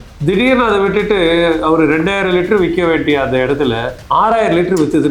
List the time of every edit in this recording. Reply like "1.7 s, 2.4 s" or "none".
3.9 s